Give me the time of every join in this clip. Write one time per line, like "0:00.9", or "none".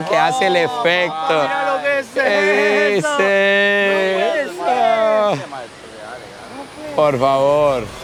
none